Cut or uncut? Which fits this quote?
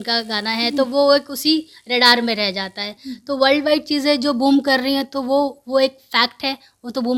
uncut